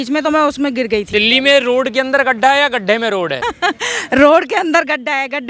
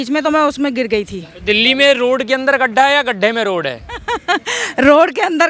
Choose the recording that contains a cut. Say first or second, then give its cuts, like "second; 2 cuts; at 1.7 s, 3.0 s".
first; 2 cuts; at 1.1 s, 3.4 s